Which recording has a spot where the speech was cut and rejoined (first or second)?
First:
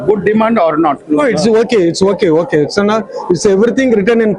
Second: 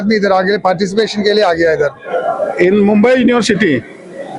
second